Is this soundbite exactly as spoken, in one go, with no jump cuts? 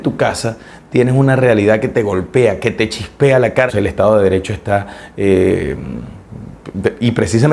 no; 1 cut; at 3.7 s

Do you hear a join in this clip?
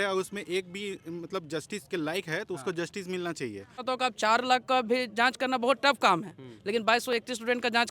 yes; 1 cut; at 3.8 s

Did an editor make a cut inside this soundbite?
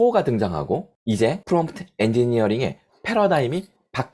yes; 1 cut; at 1.4 s

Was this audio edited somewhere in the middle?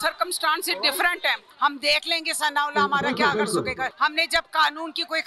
yes; 2 cuts; at 1.5 s, 3.9 s

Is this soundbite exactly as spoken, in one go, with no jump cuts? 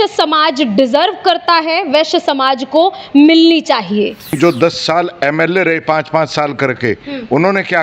no; 1 cut; at 4.4 s

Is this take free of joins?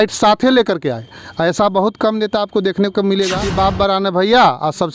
no; 1 cut; at 3.4 s

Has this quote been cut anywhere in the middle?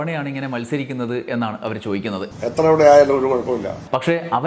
no; 0 cuts

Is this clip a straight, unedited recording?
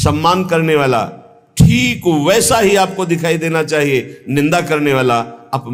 yes; 0 cuts

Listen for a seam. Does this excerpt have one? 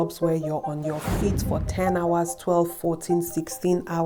no; 0 cuts

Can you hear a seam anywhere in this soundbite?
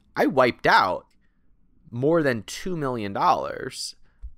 yes; 1 cut; at 1.1 s

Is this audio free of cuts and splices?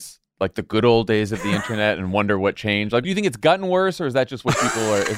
no; 1 cut; at 3.0 s

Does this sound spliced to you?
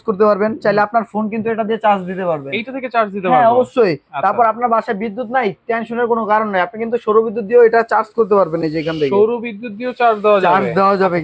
no; 0 cuts

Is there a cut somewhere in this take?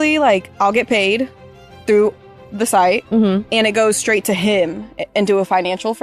no; 0 cuts

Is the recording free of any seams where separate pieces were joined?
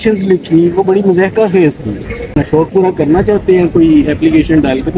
no; 1 cut; at 2.4 s

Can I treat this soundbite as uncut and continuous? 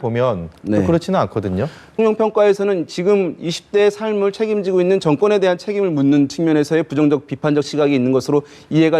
no; 1 cut; at 1.9 s

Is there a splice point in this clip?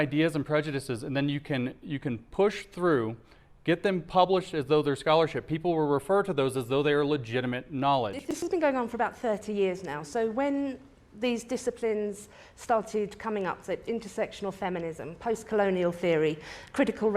yes; 1 cut; at 8.3 s

